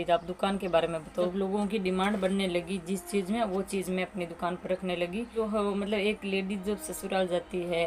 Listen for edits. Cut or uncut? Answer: cut